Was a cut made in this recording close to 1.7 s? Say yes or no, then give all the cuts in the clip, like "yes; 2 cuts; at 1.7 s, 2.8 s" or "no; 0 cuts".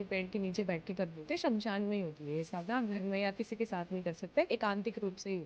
no; 1 cut; at 4.5 s